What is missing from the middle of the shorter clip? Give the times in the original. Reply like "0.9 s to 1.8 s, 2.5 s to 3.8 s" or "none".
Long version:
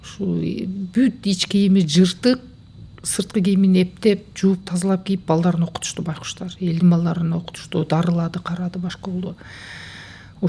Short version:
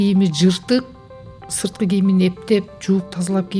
none